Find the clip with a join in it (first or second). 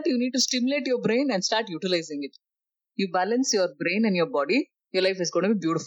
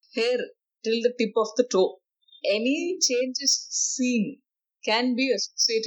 first